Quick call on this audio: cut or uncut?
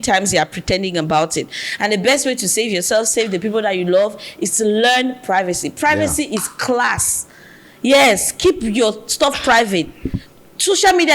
uncut